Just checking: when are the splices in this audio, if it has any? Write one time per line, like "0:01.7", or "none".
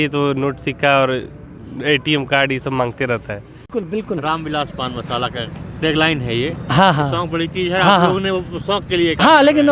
0:03.8